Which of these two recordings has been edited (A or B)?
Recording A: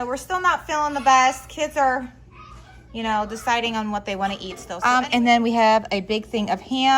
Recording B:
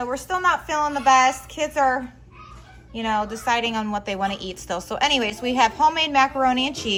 A